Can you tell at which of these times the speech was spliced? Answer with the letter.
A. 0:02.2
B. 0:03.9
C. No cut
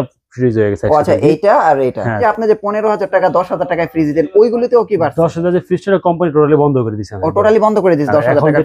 A